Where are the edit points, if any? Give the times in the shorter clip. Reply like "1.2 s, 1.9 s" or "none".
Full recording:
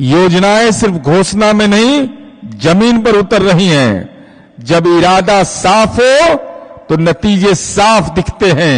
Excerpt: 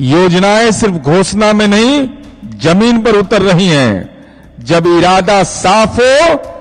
none